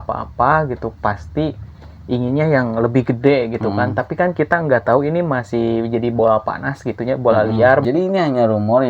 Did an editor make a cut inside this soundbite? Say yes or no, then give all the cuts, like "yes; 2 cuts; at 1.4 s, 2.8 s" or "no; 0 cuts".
yes; 1 cut; at 7.8 s